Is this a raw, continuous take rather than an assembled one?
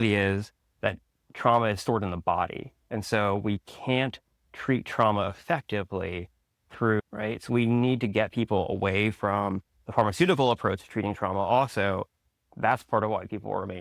no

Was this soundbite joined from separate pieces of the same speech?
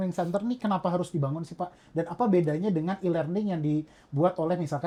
no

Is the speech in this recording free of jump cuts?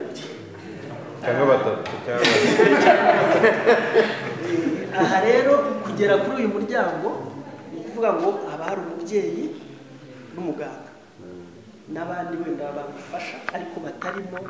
yes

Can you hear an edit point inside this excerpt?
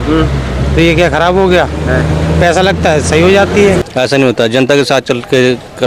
yes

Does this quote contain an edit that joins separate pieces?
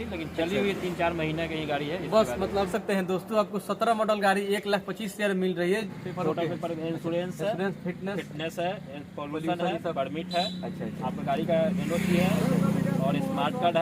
yes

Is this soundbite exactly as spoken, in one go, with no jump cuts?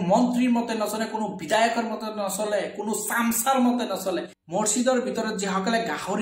no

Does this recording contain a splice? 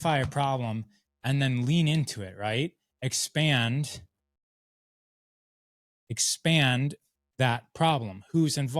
no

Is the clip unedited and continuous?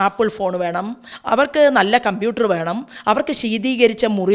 yes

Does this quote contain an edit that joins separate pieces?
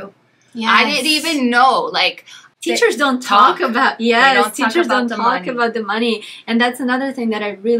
yes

